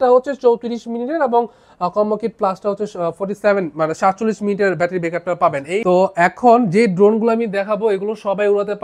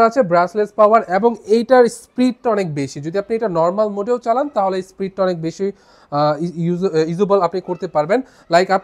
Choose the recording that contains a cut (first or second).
first